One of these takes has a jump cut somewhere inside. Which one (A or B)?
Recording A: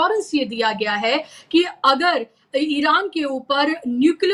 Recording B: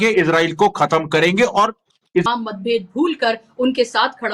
B